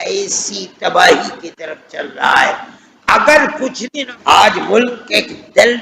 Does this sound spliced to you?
yes; 1 cut; at 3.9 s

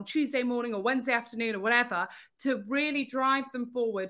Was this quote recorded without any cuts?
yes; 0 cuts

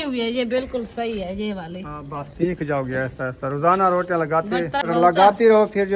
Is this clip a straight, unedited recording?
no; 1 cut; at 4.8 s

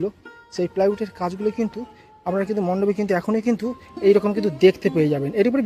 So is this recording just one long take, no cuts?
yes; 0 cuts

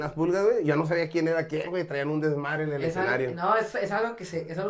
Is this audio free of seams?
yes; 0 cuts

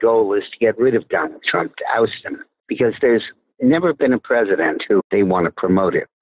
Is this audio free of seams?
yes; 0 cuts

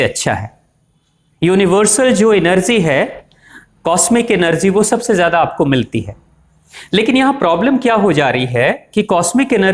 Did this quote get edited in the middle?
no; 0 cuts

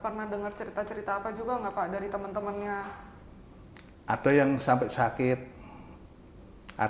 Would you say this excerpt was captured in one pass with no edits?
yes; 0 cuts

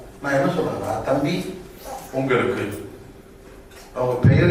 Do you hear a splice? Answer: no; 0 cuts

